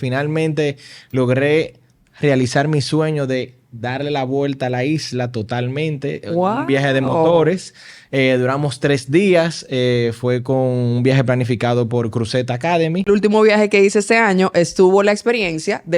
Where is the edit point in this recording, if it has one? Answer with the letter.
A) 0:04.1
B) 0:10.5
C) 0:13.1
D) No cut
C